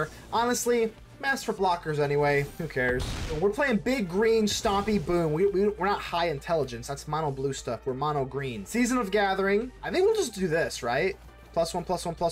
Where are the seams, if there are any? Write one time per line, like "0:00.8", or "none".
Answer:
0:03.4
0:08.6
0:09.8